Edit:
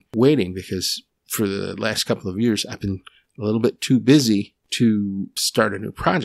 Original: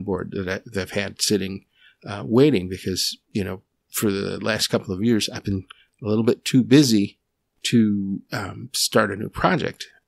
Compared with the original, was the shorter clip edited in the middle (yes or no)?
yes